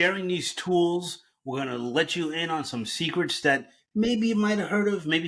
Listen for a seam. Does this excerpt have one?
no; 0 cuts

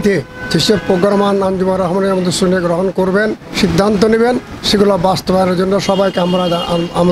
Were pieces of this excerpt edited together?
yes; 1 cut; at 3.4 s

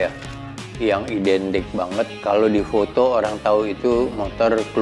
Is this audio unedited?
no; 1 cut; at 2.1 s

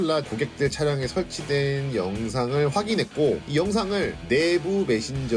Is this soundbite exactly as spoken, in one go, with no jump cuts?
yes; 0 cuts

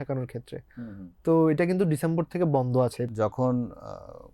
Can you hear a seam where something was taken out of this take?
yes; 1 cut; at 3.0 s

